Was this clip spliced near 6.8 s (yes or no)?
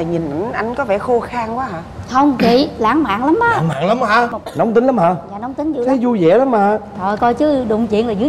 no